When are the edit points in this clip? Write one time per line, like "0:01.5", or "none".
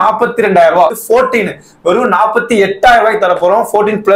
0:01.0